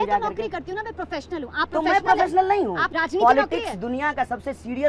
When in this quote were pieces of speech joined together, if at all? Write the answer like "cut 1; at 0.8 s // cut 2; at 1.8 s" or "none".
cut 1; at 2.8 s

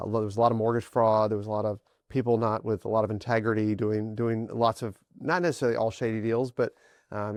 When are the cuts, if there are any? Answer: none

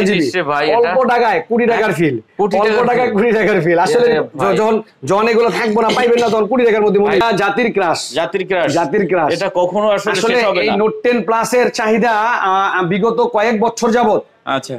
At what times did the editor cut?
cut 1; at 7.2 s

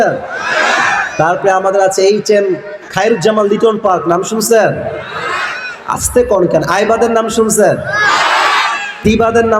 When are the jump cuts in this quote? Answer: none

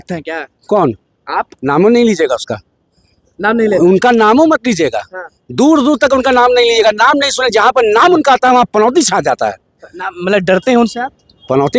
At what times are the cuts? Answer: none

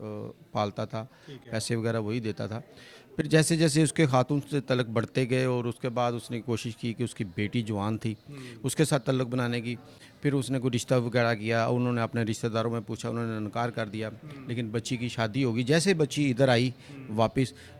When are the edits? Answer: none

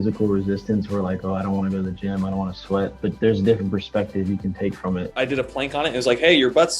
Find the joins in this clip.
cut 1; at 3.0 s // cut 2; at 5.1 s

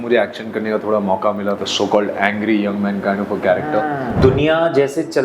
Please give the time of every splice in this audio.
cut 1; at 1.6 s // cut 2; at 4.2 s

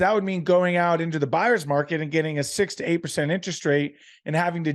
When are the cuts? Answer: none

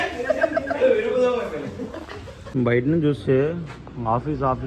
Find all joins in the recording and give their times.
cut 1; at 2.5 s

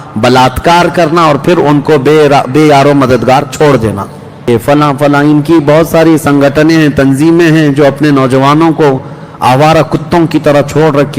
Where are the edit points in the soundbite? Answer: cut 1; at 4.5 s

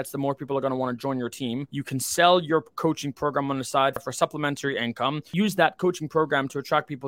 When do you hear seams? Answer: cut 1; at 1.7 s // cut 2; at 4.0 s // cut 3; at 5.3 s

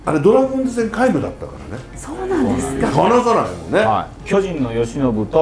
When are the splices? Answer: cut 1; at 4.1 s

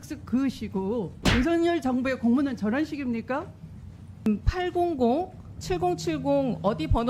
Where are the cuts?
cut 1; at 1.2 s // cut 2; at 4.3 s

